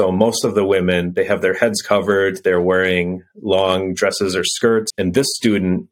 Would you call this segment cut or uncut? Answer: cut